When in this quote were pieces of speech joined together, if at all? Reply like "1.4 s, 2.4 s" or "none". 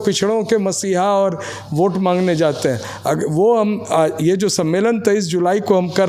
none